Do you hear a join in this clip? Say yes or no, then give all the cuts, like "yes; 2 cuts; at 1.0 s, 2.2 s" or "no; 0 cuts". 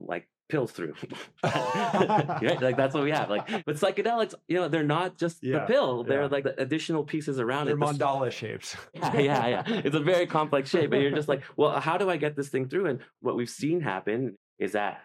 yes; 4 cuts; at 3.6 s, 6.4 s, 9.0 s, 14.3 s